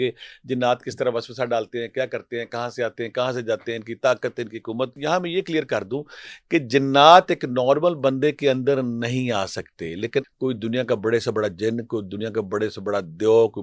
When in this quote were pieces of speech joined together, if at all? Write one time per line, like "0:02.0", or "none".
0:05.0
0:10.3